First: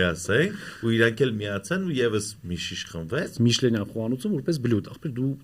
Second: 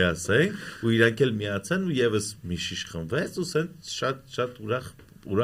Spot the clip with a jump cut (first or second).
first